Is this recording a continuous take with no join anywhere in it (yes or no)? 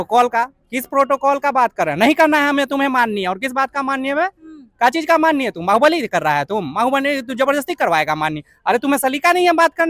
yes